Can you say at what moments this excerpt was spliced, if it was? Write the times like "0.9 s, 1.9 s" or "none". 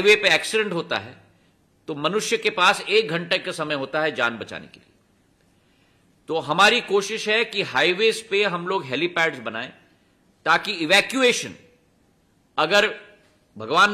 none